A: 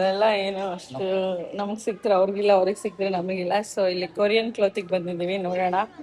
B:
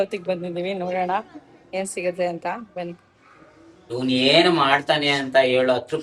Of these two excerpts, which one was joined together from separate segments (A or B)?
B